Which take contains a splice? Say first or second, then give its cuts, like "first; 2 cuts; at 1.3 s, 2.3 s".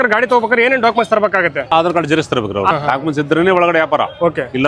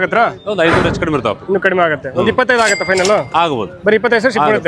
first; 2 cuts; at 1.6 s, 2.7 s